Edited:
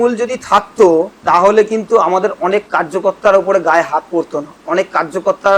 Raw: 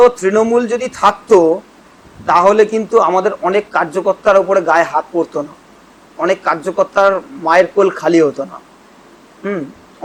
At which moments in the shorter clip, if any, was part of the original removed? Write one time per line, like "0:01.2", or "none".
0:01.1
0:04.5